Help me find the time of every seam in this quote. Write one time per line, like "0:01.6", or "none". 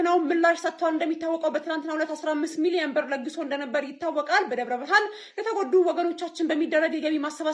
none